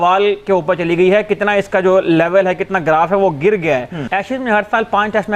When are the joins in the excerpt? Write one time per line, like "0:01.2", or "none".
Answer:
0:03.9